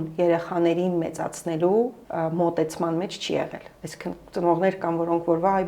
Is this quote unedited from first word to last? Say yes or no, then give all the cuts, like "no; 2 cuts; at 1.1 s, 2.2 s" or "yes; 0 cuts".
yes; 0 cuts